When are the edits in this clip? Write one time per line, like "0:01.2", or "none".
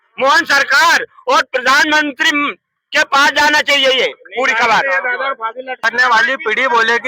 0:05.8